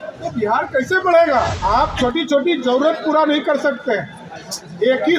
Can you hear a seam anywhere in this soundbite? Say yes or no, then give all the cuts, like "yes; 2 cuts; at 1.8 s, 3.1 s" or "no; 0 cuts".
yes; 1 cut; at 1.6 s